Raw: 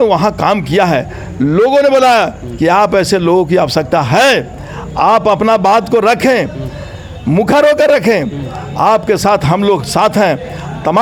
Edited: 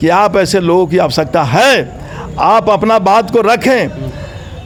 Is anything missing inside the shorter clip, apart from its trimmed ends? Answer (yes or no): no